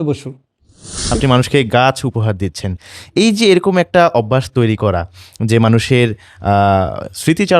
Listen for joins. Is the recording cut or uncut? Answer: cut